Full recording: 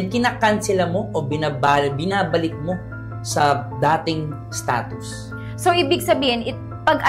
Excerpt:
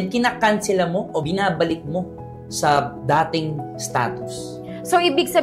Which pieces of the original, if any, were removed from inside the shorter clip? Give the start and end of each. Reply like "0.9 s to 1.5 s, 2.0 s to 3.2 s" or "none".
1.2 s to 2.0 s

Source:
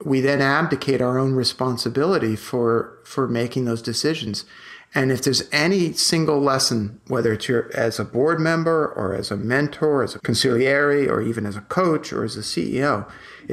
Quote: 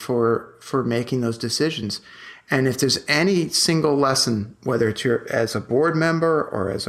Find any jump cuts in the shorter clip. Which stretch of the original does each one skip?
none

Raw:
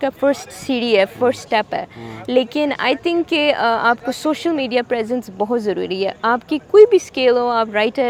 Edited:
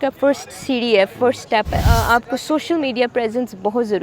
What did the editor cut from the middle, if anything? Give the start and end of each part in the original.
1.9 s to 3.6 s

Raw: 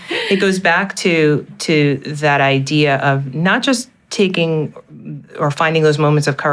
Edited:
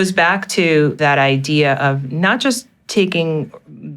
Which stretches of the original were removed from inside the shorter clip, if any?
1.4 s to 2.2 s

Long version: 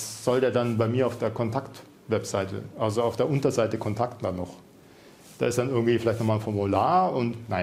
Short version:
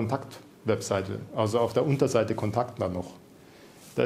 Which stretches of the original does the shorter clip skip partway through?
none

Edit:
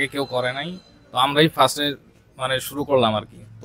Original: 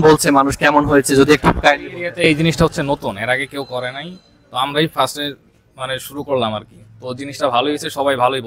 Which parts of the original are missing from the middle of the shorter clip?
none

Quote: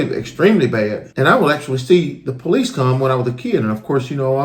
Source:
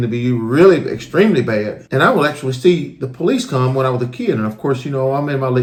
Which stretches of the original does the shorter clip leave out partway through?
none

